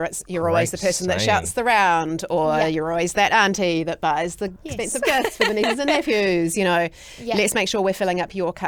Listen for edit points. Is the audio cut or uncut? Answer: uncut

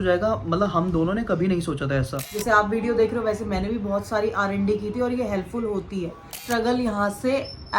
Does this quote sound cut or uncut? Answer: cut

